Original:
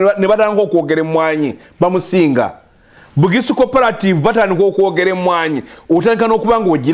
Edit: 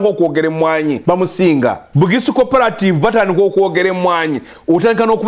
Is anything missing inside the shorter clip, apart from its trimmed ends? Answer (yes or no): yes